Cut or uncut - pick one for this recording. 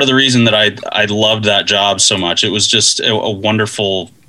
uncut